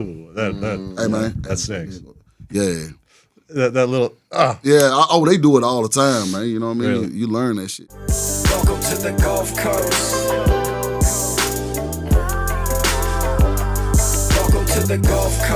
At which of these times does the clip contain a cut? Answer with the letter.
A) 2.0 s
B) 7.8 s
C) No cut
B